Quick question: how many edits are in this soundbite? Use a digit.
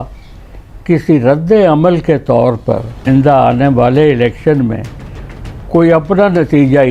1